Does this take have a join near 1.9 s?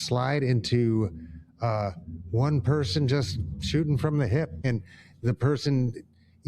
no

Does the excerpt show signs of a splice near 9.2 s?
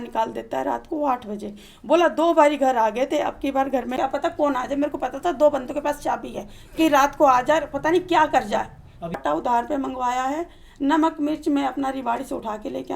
yes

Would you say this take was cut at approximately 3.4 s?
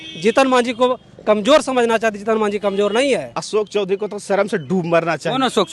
yes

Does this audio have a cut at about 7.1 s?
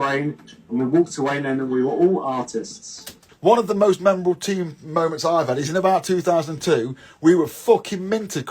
no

